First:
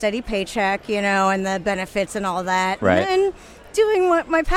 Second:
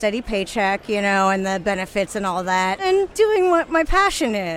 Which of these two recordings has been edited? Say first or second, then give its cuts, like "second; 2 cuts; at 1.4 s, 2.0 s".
second; 1 cut; at 2.8 s